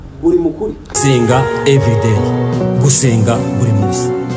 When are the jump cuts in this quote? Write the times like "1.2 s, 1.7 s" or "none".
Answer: 1.0 s